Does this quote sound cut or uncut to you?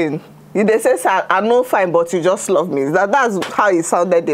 uncut